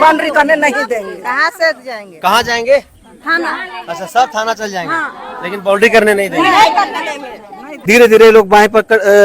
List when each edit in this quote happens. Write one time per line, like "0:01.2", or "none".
0:07.7